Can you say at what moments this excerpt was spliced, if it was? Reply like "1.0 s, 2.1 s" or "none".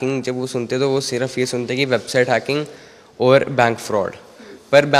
none